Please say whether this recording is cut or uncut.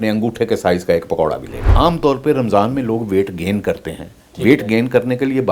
cut